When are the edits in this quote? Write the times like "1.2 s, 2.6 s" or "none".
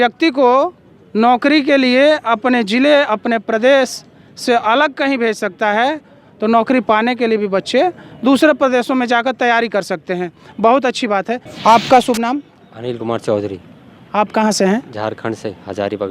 11.5 s